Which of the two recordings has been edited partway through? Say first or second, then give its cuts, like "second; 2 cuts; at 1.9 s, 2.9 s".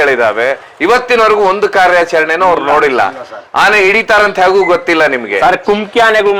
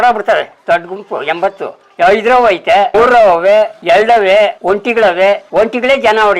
second; 4 cuts; at 2.9 s, 3.8 s, 4.6 s, 5.4 s